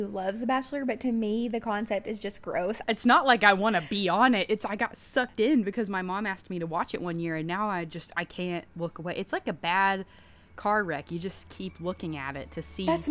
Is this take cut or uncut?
cut